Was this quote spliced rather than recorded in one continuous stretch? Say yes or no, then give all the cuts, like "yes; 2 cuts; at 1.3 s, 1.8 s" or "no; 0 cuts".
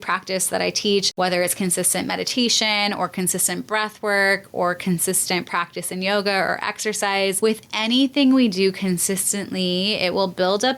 yes; 2 cuts; at 1.1 s, 7.4 s